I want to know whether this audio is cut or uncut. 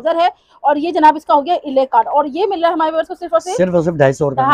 uncut